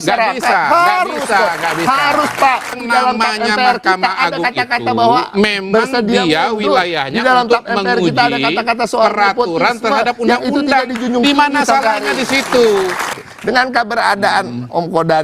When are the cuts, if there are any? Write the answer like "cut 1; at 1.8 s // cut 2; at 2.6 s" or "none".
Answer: cut 1; at 2.8 s // cut 2; at 13.1 s